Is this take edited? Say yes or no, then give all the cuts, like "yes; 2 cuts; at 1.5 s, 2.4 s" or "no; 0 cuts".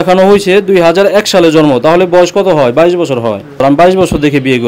yes; 1 cut; at 3.6 s